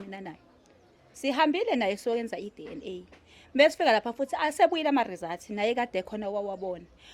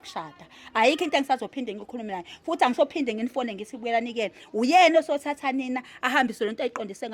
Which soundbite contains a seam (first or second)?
first